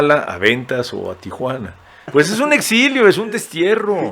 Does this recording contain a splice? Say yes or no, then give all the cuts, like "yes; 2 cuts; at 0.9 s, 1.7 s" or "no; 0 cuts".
yes; 1 cut; at 2.0 s